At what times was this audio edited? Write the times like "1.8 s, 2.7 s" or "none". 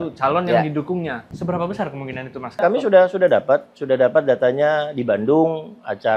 1.3 s, 2.6 s